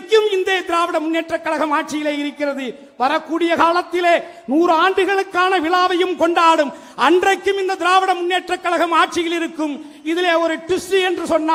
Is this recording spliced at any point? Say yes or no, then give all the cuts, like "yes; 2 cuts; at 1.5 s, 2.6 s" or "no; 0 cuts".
no; 0 cuts